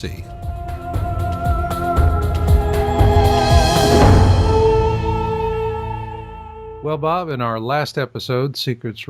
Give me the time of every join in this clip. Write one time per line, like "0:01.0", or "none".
0:07.3